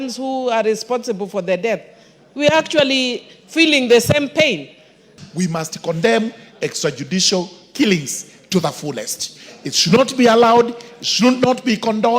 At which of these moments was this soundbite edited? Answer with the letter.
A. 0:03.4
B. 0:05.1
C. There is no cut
B